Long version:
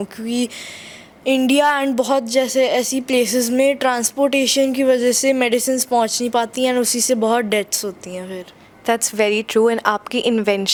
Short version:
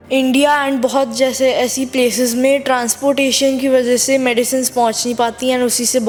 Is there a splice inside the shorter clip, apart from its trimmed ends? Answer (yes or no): no